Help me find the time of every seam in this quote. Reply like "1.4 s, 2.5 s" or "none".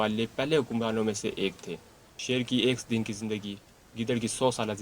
2.1 s